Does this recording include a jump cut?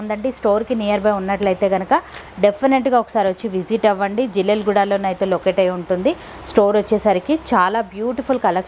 no; 0 cuts

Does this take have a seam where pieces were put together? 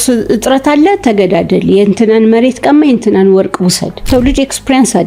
yes; 1 cut; at 4.1 s

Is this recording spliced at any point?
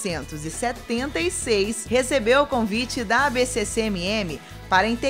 yes; 1 cut; at 1.8 s

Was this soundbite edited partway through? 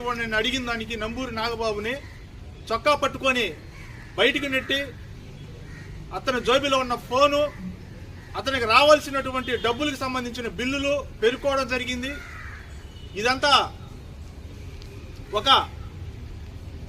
yes; 1 cut; at 10.9 s

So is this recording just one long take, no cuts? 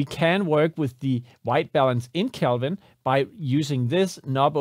yes; 0 cuts

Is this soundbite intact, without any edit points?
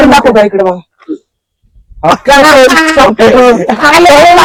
yes; 0 cuts

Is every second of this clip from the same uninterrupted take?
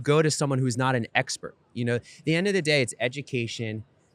yes; 0 cuts

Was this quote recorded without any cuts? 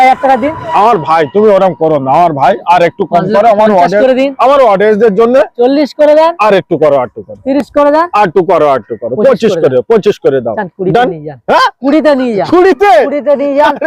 yes; 0 cuts

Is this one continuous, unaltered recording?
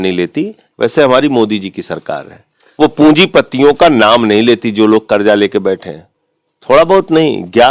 yes; 0 cuts

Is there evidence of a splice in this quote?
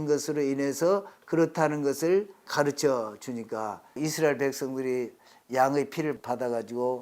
yes; 3 cuts; at 2.5 s, 4.0 s, 6.2 s

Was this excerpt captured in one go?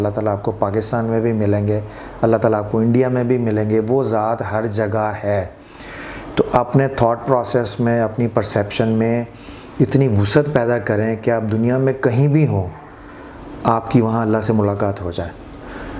yes; 0 cuts

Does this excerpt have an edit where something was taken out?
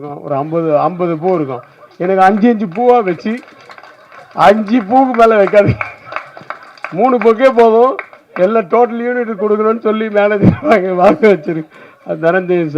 no; 0 cuts

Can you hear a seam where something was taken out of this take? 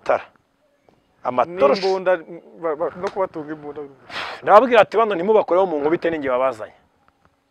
no; 0 cuts

